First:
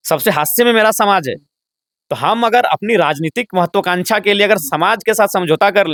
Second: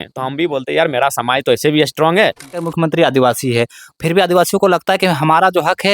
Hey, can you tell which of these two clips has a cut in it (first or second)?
second